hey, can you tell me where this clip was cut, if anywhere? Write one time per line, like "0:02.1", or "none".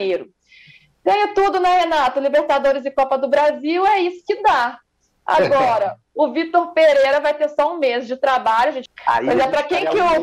0:08.8